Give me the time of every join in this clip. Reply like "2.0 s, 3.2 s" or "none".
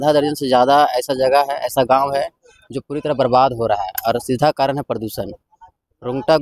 none